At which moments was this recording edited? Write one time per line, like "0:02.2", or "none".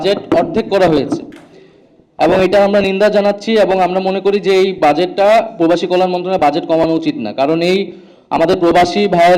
none